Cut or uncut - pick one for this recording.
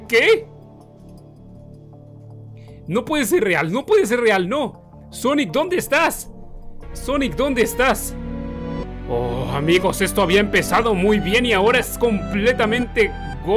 uncut